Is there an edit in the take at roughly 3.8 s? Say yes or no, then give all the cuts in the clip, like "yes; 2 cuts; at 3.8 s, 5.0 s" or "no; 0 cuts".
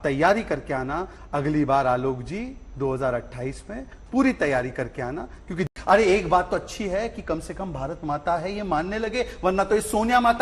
no; 1 cut; at 5.7 s